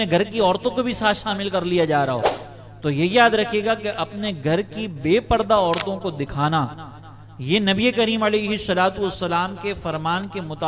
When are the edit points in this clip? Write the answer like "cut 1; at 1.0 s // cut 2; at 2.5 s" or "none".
none